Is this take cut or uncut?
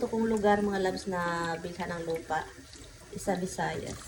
uncut